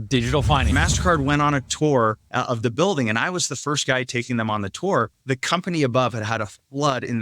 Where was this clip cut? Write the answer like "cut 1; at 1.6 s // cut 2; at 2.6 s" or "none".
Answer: cut 1; at 0.7 s // cut 2; at 2.3 s // cut 3; at 5.2 s